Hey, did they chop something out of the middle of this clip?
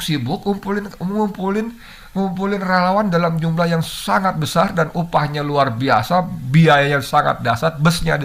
no; 0 cuts

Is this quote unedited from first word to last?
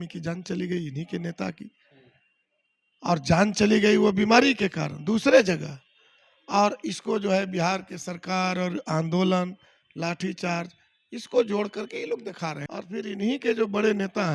no; 1 cut; at 12.6 s

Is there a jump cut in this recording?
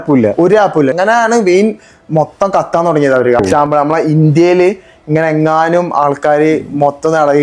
yes; 2 cuts; at 0.9 s, 3.4 s

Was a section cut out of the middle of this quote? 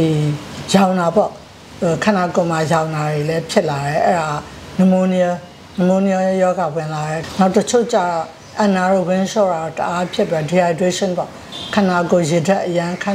yes; 1 cut; at 7.2 s

